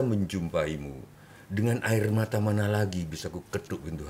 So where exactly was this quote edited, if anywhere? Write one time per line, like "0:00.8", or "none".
none